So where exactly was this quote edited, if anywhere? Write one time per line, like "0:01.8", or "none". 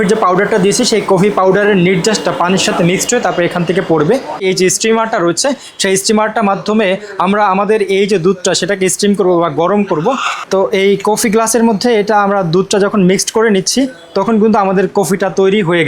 0:04.4
0:10.4